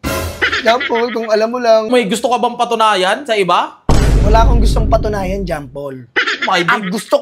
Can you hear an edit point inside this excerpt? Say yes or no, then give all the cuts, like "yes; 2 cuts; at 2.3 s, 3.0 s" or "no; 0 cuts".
yes; 1 cut; at 1.9 s